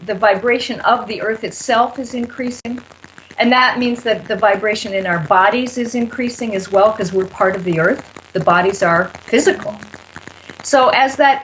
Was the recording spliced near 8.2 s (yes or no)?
yes